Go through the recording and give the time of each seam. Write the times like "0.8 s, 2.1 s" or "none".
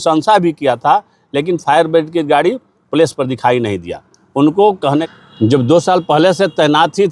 5.1 s